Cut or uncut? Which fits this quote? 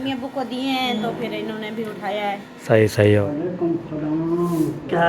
cut